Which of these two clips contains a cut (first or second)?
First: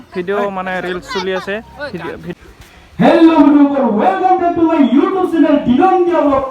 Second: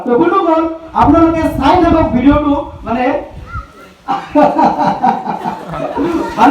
first